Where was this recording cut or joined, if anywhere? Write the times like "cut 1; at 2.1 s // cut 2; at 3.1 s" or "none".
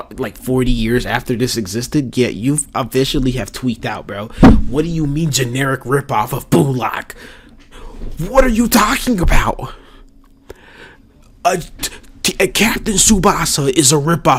none

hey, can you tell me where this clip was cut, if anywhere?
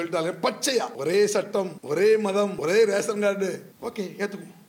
cut 1; at 0.9 s // cut 2; at 1.8 s // cut 3; at 2.6 s // cut 4; at 3.7 s

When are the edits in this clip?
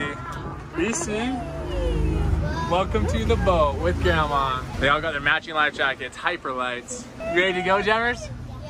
cut 1; at 4.7 s // cut 2; at 7.2 s

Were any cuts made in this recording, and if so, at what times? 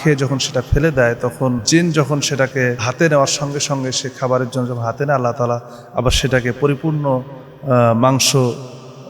cut 1; at 1.6 s // cut 2; at 2.8 s

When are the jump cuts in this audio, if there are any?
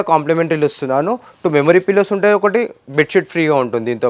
none

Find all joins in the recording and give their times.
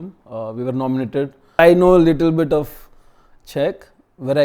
cut 1; at 1.6 s

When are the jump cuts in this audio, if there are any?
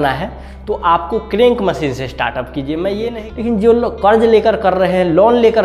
cut 1; at 3.1 s

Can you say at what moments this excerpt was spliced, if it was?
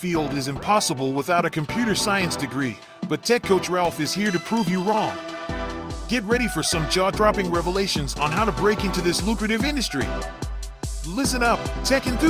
cut 1; at 2.3 s

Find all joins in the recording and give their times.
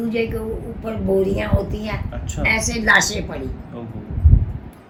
none

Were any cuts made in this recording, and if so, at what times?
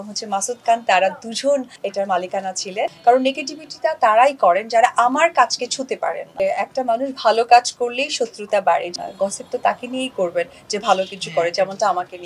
cut 1; at 1.8 s // cut 2; at 3.0 s // cut 3; at 6.3 s // cut 4; at 8.9 s

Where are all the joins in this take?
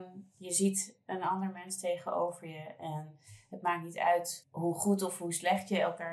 cut 1; at 4.4 s

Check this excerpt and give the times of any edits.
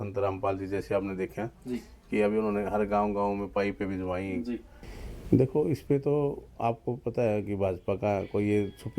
cut 1; at 4.8 s

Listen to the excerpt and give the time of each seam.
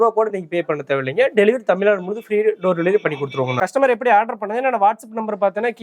cut 1; at 3.5 s

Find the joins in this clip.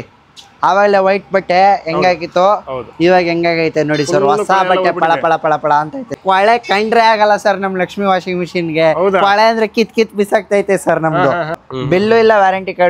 cut 1; at 6.2 s // cut 2; at 11.7 s

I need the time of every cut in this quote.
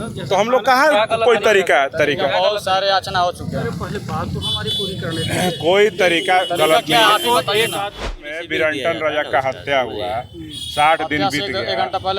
cut 1; at 8.3 s

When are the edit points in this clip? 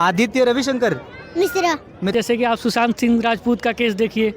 cut 1; at 2.1 s

